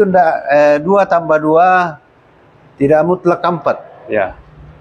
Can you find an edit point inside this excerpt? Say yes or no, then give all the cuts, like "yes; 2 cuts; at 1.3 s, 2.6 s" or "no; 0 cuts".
no; 0 cuts